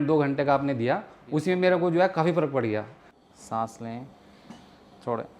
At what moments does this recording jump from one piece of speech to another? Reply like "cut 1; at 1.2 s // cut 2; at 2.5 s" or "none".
cut 1; at 3.0 s